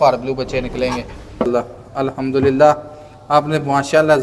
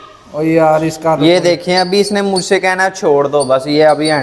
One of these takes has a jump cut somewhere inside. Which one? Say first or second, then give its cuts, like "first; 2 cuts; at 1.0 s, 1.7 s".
first; 1 cut; at 1.5 s